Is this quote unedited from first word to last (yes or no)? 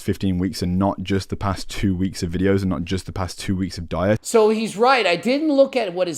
no